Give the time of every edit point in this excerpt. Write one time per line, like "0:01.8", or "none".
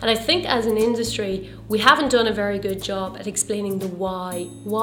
none